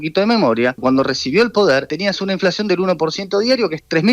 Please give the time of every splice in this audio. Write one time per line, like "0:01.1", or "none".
0:00.8
0:01.9